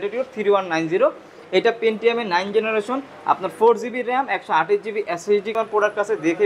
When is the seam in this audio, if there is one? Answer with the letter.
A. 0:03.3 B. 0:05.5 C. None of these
B